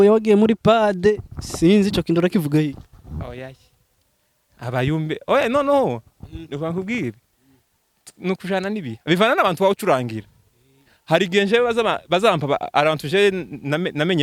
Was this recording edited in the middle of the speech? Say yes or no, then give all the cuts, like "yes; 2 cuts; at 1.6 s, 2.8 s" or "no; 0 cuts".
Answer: no; 0 cuts